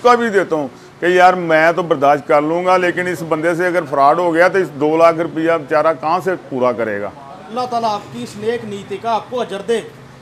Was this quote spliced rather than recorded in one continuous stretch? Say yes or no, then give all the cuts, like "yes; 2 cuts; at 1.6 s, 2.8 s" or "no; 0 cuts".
no; 0 cuts